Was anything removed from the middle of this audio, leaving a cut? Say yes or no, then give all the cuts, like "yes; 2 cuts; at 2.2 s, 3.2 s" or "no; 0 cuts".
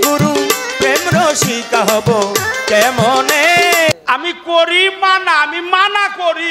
yes; 1 cut; at 3.9 s